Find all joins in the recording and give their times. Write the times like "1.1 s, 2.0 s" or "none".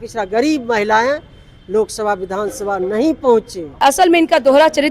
3.8 s